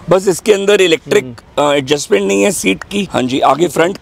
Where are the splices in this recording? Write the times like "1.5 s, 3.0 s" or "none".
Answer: 3.0 s